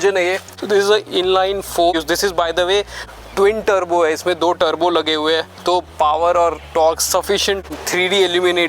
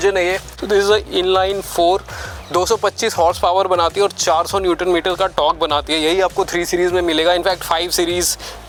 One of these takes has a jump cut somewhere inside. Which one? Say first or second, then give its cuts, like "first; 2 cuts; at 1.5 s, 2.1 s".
first; 2 cuts; at 1.9 s, 7.7 s